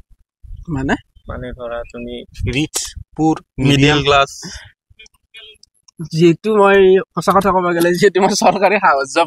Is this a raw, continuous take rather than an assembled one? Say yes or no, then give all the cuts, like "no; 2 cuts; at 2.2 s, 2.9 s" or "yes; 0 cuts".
yes; 0 cuts